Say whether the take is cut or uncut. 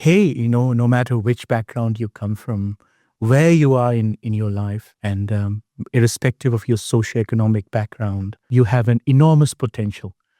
cut